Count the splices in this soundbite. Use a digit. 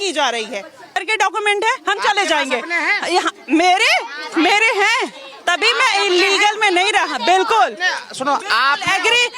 1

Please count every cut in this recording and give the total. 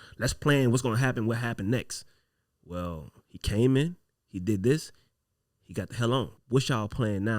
1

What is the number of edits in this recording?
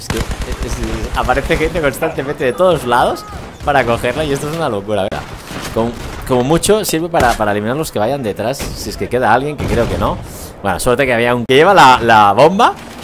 2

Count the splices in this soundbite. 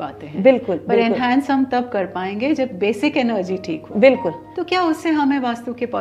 1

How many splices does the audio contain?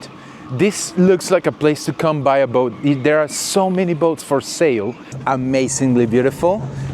1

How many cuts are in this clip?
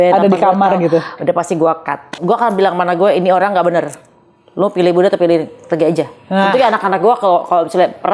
1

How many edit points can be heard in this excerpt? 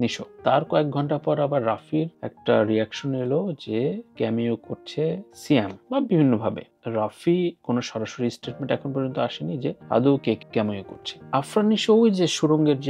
1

